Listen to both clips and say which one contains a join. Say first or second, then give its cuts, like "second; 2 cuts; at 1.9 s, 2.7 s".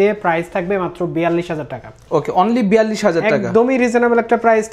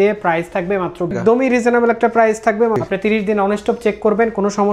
second; 2 cuts; at 1.1 s, 2.8 s